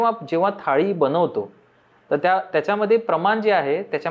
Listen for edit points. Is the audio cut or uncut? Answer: uncut